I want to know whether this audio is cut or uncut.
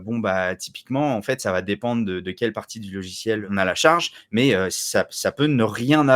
cut